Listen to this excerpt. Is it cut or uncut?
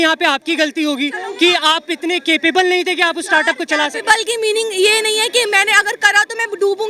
uncut